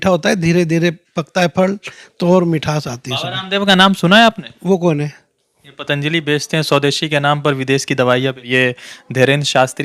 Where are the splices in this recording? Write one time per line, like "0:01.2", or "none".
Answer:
0:08.5